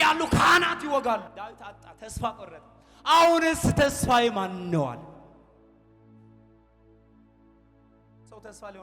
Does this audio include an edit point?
yes; 1 cut; at 1.3 s

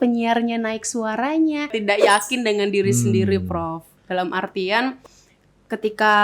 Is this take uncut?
no; 1 cut; at 1.8 s

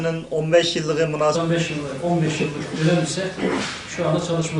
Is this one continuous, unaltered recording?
yes; 0 cuts

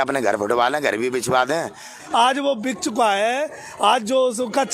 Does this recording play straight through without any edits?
no; 1 cut; at 1.9 s

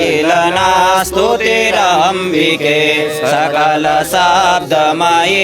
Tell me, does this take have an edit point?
no; 0 cuts

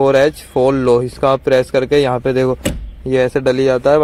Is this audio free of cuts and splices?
yes; 0 cuts

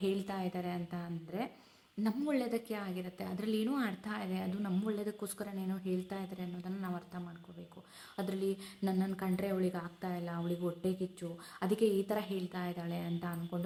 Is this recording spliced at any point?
no; 0 cuts

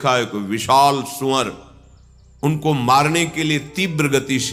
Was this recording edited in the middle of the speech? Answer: no; 0 cuts

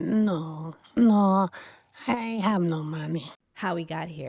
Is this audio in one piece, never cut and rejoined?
yes; 0 cuts

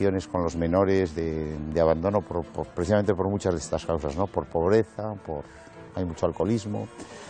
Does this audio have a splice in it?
no; 0 cuts

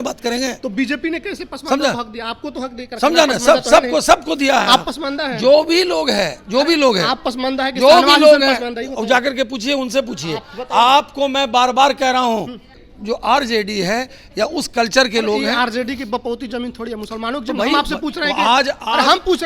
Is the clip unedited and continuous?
no; 1 cut; at 12.8 s

